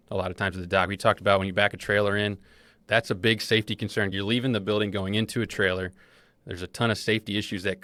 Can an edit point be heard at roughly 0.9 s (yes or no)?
no